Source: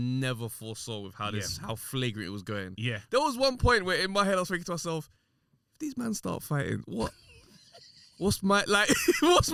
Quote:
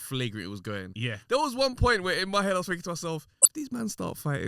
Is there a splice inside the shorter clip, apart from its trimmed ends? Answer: yes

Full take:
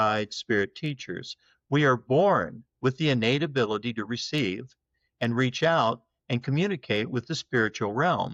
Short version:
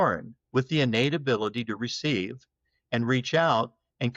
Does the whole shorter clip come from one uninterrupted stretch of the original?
yes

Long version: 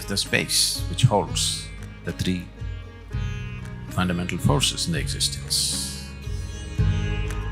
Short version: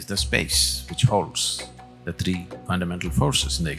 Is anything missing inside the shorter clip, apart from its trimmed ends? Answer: yes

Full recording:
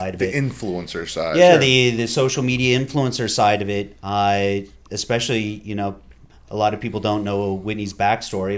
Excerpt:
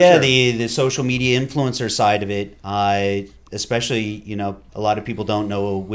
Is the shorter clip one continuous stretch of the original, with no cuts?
no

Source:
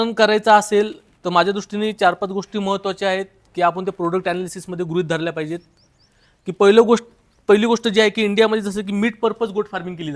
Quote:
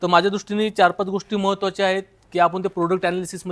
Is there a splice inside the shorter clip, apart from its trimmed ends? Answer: no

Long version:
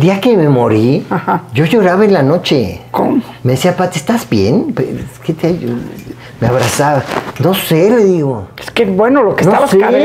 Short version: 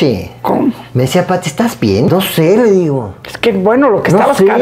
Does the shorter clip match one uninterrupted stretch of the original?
no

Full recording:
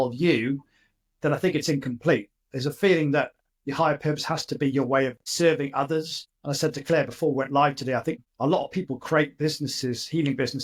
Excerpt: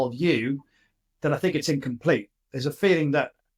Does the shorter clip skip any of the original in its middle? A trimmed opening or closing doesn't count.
no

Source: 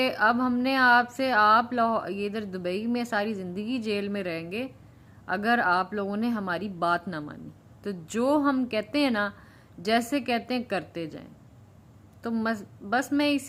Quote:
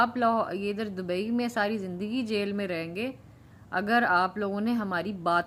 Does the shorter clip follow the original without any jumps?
yes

